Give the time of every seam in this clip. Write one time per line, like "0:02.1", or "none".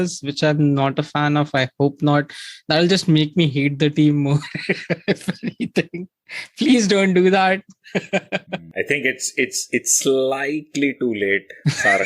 0:08.7